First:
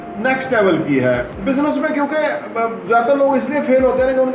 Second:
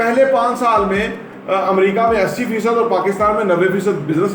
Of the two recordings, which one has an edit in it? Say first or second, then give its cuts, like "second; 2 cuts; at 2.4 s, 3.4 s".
first; 1 cut; at 1.3 s